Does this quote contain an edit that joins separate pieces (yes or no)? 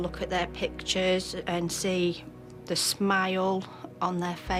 no